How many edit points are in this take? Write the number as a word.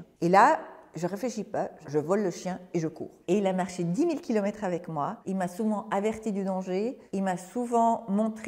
three